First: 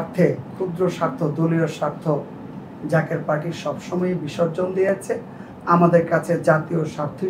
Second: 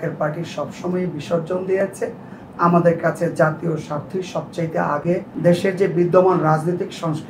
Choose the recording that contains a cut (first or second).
second